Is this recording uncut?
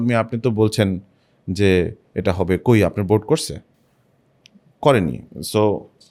yes; 0 cuts

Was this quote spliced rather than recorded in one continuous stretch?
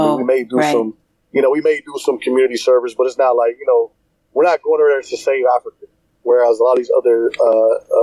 no; 0 cuts

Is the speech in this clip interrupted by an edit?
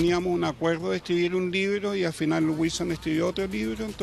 no; 0 cuts

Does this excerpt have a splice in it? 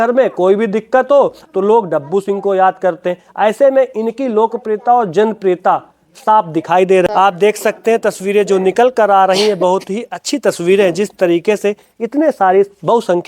yes; 1 cut; at 7.1 s

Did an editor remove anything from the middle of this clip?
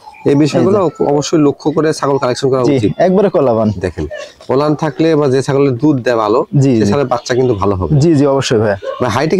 no; 0 cuts

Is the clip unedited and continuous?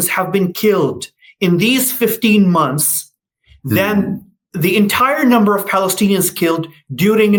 yes; 0 cuts

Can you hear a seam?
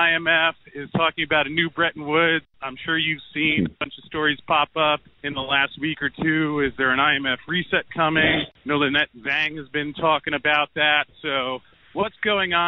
yes; 4 cuts; at 2.5 s, 5.2 s, 8.5 s, 11.7 s

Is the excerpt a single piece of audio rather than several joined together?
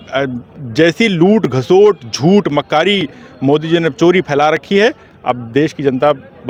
yes; 0 cuts

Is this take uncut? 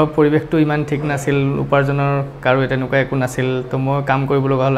yes; 0 cuts

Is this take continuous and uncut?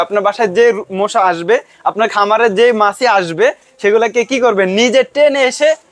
yes; 0 cuts

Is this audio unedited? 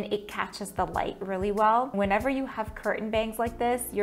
no; 1 cut; at 1.9 s

